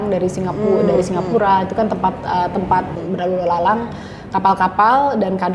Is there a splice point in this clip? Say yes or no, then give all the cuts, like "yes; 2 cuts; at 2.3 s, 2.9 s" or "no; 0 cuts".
yes; 1 cut; at 2.9 s